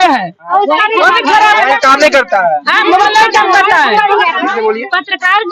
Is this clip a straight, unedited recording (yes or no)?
no